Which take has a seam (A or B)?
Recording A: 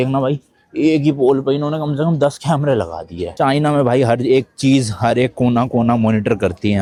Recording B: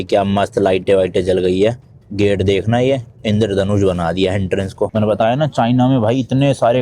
B